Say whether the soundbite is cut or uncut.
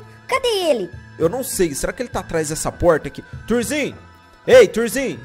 uncut